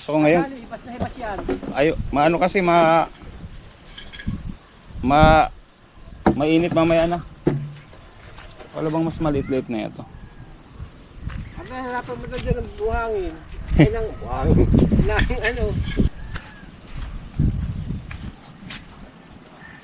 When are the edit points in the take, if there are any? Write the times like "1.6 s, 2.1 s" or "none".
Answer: 16.1 s